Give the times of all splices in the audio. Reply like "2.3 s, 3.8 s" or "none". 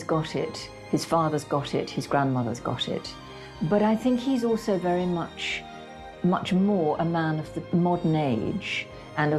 3.2 s, 7.7 s

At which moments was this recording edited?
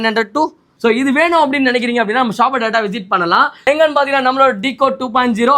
3.6 s

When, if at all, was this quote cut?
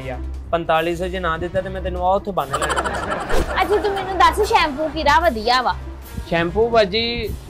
2.6 s

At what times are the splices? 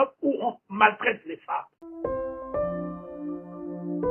1.8 s

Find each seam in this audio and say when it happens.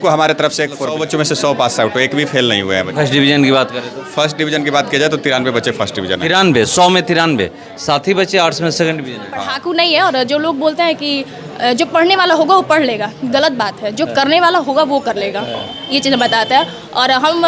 0.9 s, 9.5 s

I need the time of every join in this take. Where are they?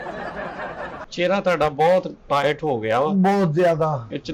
1.0 s

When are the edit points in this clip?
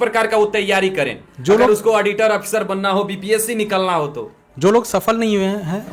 none

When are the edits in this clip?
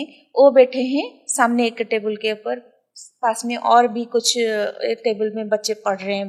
none

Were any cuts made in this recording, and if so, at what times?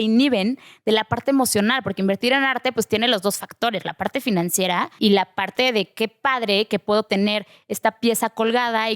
4.9 s

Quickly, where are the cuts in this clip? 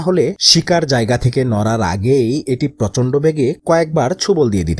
none

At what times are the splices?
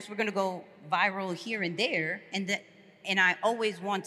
none

